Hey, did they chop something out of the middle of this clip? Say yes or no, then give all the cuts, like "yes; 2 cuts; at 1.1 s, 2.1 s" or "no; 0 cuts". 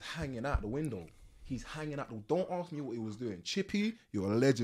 no; 0 cuts